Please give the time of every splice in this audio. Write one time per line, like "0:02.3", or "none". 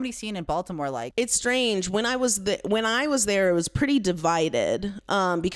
none